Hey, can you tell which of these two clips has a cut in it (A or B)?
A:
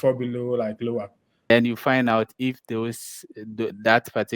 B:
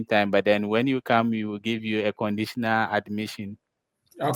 A